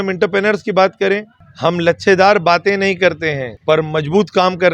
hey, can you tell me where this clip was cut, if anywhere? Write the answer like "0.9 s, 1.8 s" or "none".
1.4 s, 3.5 s